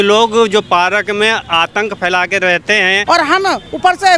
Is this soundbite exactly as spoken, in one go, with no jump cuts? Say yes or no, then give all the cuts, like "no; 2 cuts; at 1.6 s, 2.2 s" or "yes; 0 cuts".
no; 1 cut; at 3.0 s